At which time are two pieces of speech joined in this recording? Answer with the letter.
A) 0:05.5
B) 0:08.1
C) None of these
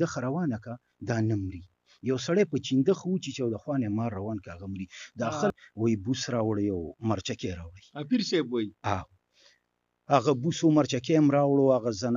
A